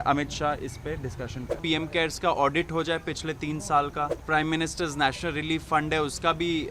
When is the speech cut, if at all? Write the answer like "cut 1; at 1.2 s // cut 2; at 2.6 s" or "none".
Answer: cut 1; at 1.6 s // cut 2; at 4.2 s